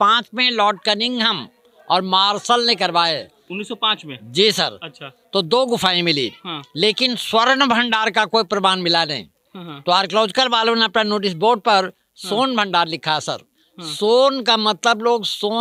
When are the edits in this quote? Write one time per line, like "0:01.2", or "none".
none

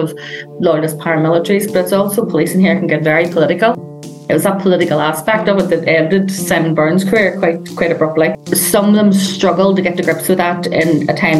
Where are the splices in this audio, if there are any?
0:08.4

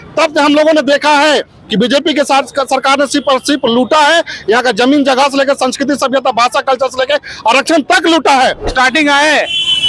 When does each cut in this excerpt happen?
0:08.7

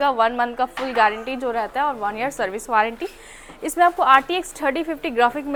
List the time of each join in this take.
none

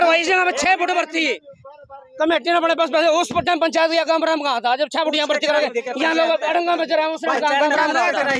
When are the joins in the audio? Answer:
none

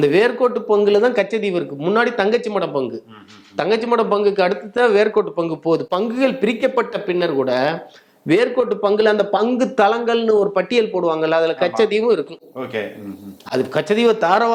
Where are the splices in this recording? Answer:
none

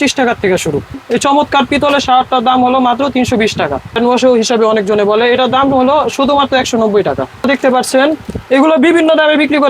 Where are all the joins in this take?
0:01.0
0:04.0
0:07.4

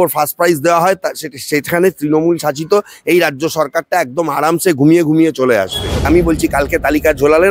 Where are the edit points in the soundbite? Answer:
0:06.1

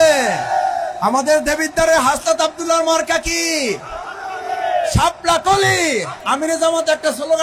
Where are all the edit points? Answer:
0:06.2

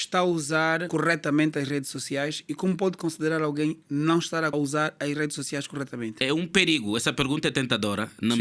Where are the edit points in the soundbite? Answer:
0:00.8
0:04.5
0:06.2

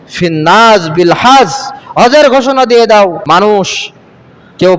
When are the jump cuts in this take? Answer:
0:03.2

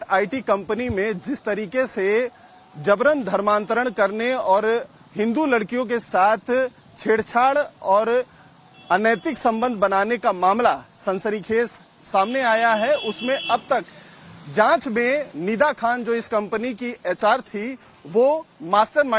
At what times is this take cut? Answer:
0:15.0

